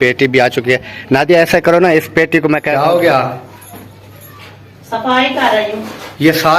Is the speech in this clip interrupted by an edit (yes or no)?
yes